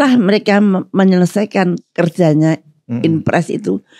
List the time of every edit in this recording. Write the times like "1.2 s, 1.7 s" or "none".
1.8 s